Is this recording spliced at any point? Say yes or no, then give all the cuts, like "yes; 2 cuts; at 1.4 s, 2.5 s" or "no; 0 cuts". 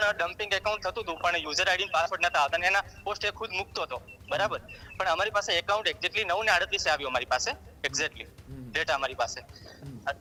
no; 0 cuts